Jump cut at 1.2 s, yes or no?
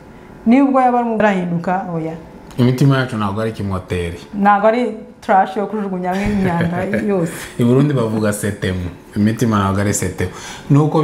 yes